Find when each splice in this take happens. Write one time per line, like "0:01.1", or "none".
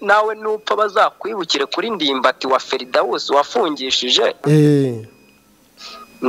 0:04.4